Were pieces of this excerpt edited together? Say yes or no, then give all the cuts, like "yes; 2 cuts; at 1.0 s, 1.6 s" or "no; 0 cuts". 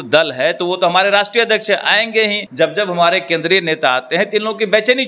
yes; 1 cut; at 2.4 s